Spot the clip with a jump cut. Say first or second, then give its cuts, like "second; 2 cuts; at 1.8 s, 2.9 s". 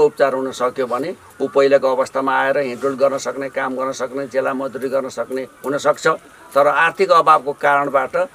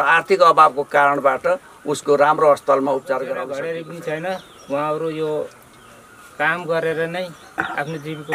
second; 1 cut; at 3.5 s